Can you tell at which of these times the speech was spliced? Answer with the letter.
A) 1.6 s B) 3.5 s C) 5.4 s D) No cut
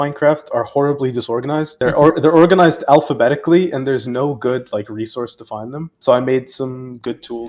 D